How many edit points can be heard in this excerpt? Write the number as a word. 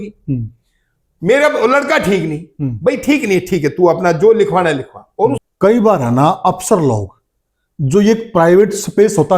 one